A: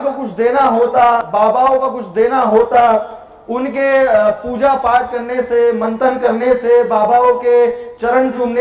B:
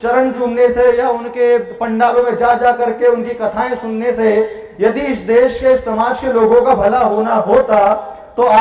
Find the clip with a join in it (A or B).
A